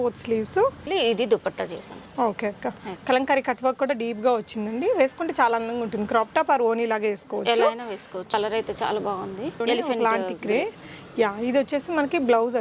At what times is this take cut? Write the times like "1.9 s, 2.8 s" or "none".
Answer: 0.9 s, 8.3 s, 9.6 s

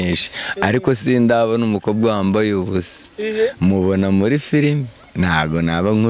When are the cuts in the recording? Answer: none

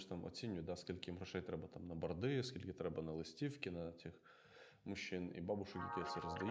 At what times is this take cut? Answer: none

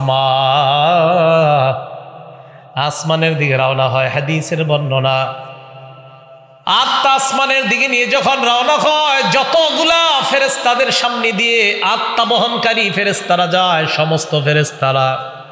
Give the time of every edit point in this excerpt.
none

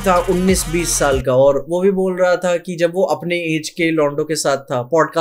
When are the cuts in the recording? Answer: 1.6 s

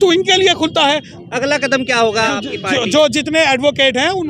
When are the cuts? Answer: 1.1 s, 2.3 s

